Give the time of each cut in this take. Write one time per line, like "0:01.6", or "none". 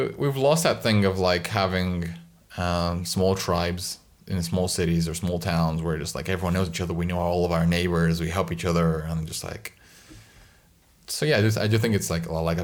none